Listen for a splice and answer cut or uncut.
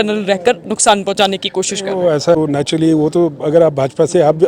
cut